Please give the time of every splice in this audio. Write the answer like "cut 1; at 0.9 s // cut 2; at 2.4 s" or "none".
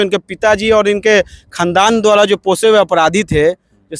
none